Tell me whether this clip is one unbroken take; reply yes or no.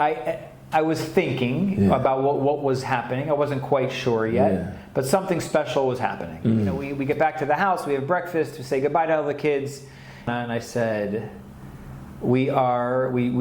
no